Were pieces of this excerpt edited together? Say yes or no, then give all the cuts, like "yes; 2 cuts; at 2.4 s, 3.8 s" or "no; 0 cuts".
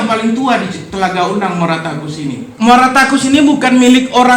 yes; 1 cut; at 2.4 s